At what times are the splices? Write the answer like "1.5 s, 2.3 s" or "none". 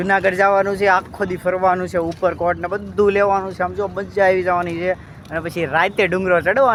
none

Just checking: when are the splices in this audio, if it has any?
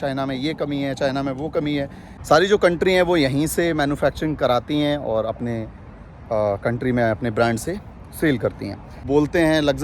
2.1 s, 9.0 s

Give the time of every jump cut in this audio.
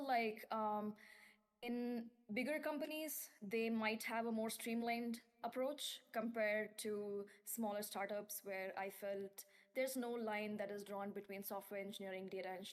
none

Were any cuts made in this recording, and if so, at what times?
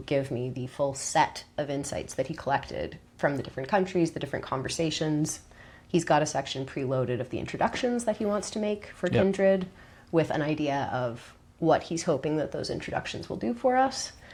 none

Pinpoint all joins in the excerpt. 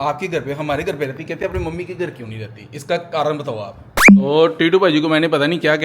4.2 s

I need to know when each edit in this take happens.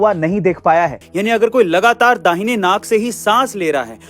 1.0 s

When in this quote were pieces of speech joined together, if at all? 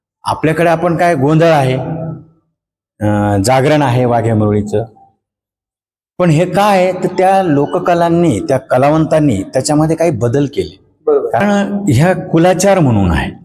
11.4 s

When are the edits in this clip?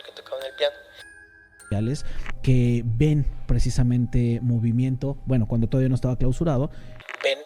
1.7 s

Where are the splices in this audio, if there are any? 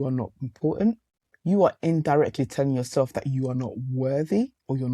1.2 s

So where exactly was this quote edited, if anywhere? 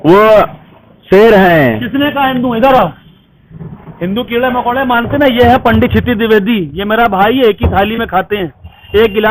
none

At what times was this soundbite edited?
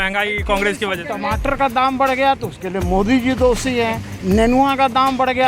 1.1 s

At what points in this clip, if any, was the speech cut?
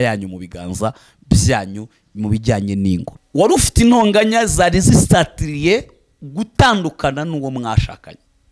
3.2 s

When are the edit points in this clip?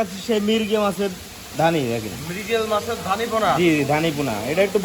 none

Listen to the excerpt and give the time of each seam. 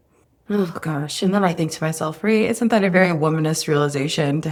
none

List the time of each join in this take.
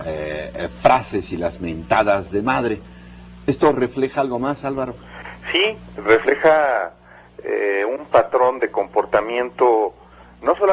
8.2 s

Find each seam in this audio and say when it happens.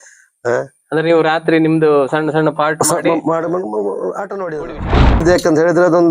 5.2 s

